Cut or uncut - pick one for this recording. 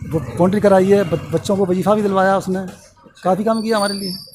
uncut